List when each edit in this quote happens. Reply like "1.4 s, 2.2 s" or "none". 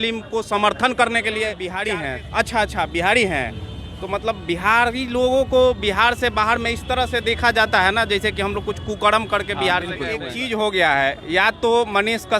1.8 s, 10.3 s